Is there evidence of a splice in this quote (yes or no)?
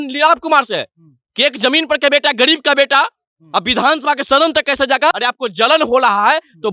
yes